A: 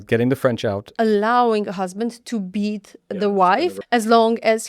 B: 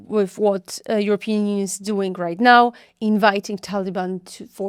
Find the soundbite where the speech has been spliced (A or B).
A